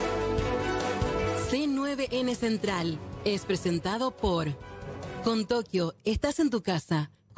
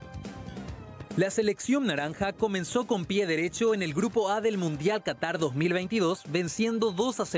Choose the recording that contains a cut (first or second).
second